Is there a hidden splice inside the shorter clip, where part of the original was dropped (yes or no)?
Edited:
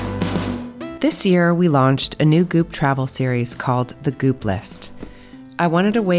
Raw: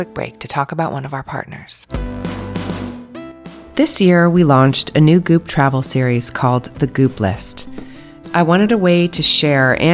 yes